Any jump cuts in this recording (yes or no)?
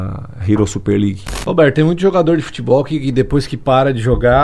yes